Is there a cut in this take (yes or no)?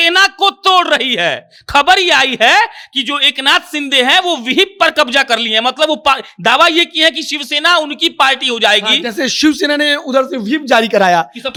no